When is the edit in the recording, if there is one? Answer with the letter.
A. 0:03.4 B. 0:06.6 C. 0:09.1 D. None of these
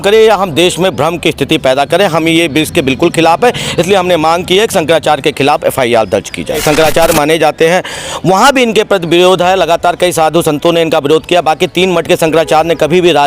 B